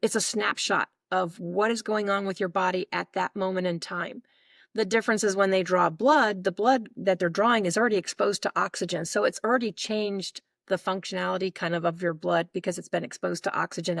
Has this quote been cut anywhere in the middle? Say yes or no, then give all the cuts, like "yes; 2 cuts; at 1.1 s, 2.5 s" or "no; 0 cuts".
no; 0 cuts